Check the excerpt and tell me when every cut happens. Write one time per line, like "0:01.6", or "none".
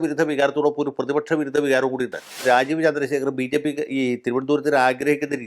0:02.4